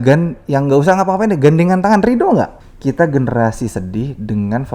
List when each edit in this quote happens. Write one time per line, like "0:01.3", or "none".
0:02.7